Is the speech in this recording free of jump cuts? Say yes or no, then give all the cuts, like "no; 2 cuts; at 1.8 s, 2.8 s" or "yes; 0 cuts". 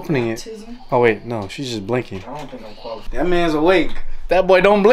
no; 1 cut; at 3.0 s